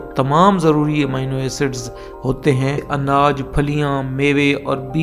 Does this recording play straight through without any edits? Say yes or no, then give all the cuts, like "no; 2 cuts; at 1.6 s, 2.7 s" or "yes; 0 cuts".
no; 1 cut; at 2.8 s